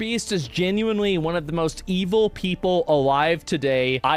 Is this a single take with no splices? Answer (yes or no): yes